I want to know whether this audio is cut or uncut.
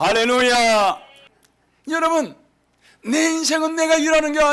cut